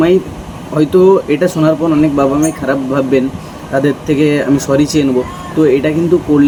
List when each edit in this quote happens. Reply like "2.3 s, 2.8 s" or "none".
none